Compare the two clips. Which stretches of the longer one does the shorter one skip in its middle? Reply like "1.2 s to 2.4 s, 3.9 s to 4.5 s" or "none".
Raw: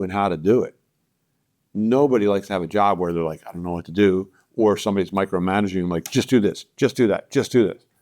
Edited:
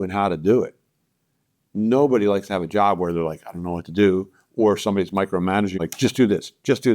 5.8 s to 5.9 s